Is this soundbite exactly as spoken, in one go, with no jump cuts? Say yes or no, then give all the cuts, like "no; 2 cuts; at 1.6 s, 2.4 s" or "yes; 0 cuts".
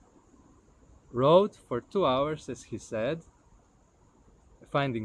yes; 0 cuts